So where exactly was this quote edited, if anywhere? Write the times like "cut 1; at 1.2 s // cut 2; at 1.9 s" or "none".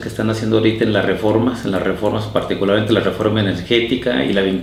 none